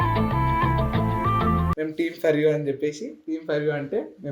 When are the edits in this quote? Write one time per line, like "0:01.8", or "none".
0:01.7